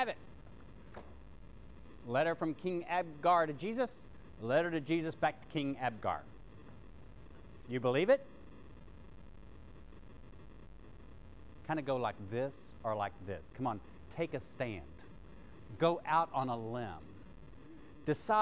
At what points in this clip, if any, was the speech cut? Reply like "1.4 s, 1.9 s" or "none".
none